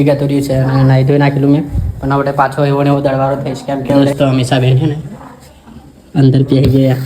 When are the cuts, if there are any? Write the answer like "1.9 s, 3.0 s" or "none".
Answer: 4.0 s